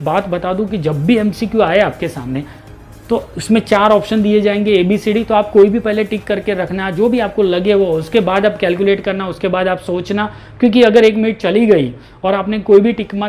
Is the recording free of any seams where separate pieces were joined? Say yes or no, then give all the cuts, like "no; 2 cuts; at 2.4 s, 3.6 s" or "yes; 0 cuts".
yes; 0 cuts